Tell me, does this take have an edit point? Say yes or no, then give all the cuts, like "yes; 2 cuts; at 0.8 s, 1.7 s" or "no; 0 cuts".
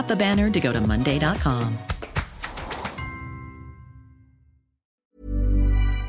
yes; 1 cut; at 4.9 s